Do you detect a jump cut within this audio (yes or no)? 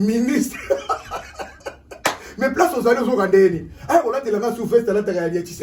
no